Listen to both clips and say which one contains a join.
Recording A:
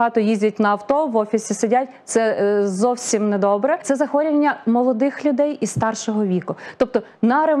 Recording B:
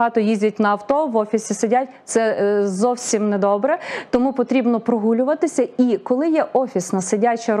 A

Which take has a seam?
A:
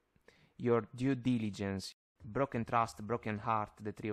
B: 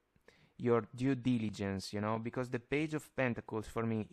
A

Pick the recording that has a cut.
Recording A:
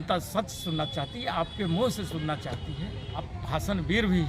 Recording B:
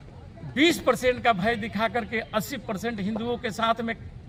A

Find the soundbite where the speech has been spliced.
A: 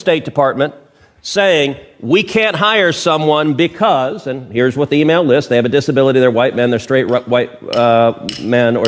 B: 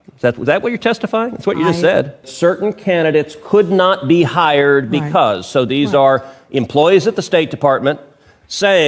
B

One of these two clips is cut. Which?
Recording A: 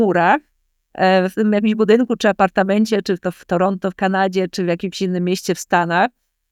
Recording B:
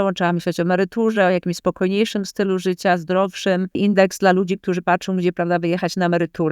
B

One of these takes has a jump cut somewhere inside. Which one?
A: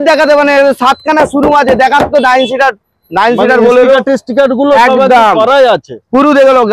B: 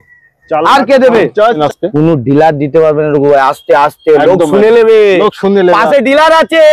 B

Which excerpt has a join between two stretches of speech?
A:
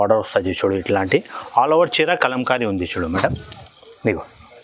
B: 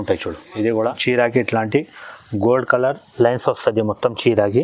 B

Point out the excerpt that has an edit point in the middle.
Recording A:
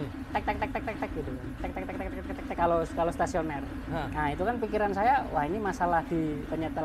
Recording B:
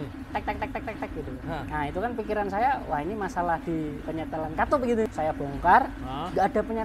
B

